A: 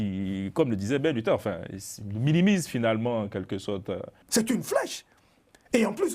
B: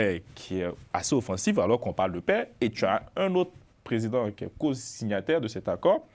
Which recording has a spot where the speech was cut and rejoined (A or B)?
A